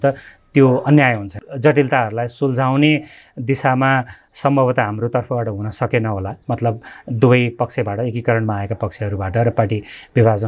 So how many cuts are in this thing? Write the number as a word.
one